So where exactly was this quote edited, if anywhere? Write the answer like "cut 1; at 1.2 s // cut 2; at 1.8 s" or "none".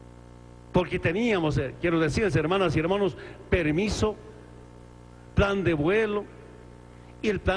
none

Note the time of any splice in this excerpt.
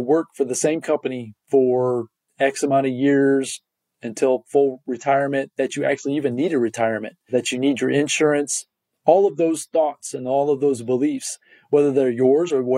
cut 1; at 4.9 s // cut 2; at 7.3 s

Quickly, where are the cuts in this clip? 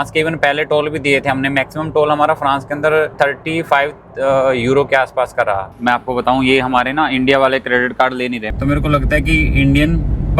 cut 1; at 3.1 s // cut 2; at 5.7 s // cut 3; at 8.4 s

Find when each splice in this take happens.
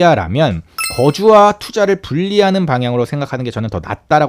none

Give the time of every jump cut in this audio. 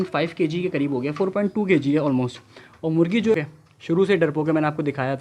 cut 1; at 3.3 s

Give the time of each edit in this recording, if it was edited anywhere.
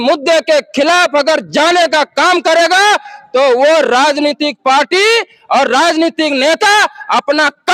none

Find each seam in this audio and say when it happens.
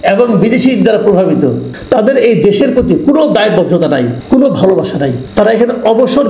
cut 1; at 1.7 s // cut 2; at 4.2 s // cut 3; at 5.2 s

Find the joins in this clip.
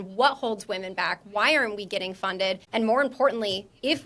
cut 1; at 2.6 s

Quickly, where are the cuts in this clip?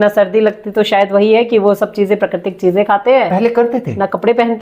none

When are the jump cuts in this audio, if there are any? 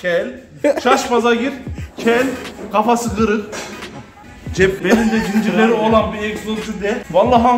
none

